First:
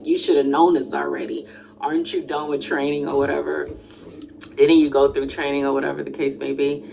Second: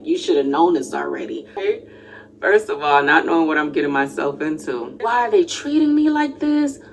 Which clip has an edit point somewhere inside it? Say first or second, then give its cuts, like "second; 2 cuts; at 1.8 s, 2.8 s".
second; 2 cuts; at 1.6 s, 5.1 s